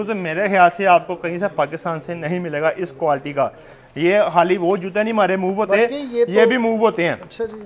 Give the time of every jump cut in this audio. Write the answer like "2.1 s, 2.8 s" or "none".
none

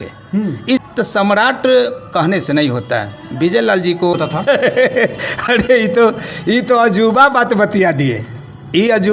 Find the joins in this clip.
0.8 s, 4.1 s

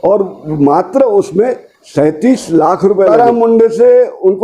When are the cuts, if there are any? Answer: 3.1 s

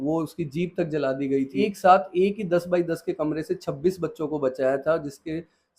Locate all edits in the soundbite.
1.5 s

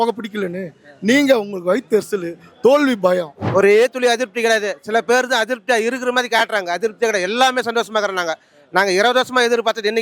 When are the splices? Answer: 3.5 s

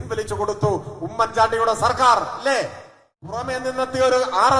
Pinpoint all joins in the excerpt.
3.4 s

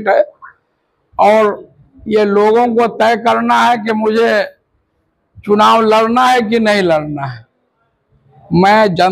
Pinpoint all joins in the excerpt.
none

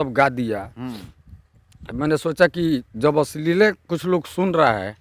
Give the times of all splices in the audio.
none

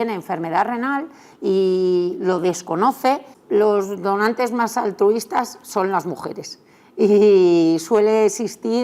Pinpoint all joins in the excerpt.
3.3 s

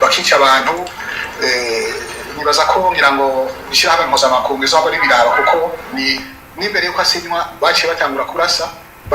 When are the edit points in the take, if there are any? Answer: 6.1 s

